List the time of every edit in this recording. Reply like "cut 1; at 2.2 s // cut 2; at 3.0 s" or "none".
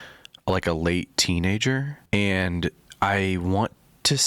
cut 1; at 2.0 s